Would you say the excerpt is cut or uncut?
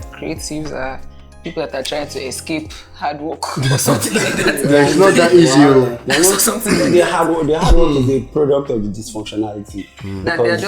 uncut